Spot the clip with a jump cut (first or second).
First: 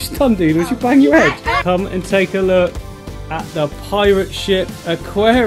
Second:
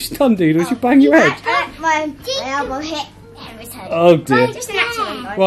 first